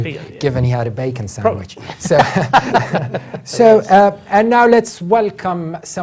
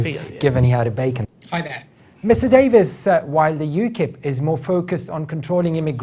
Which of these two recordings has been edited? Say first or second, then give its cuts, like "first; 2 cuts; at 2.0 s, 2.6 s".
first; 1 cut; at 1.3 s